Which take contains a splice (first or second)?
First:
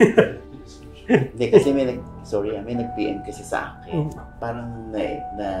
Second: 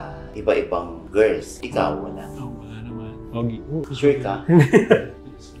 second